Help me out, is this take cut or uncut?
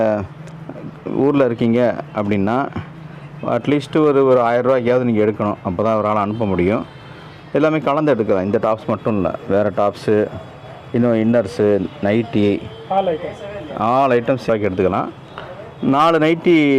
cut